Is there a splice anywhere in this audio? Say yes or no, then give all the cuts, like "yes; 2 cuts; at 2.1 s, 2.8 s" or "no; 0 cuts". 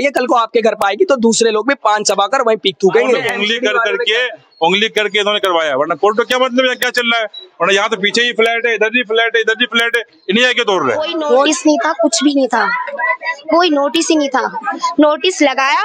yes; 2 cuts; at 3.3 s, 11.5 s